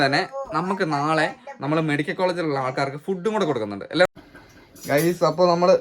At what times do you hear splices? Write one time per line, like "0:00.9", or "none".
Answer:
0:04.1